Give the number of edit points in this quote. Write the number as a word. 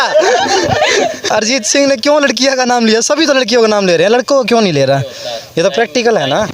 zero